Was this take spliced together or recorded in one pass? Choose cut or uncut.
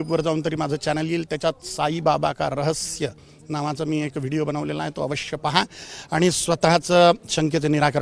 uncut